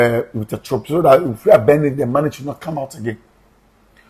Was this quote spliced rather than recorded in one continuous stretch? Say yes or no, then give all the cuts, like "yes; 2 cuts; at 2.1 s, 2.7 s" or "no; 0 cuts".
no; 0 cuts